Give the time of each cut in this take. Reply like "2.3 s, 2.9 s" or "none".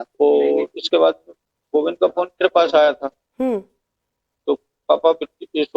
1.9 s